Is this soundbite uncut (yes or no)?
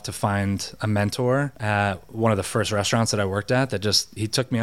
yes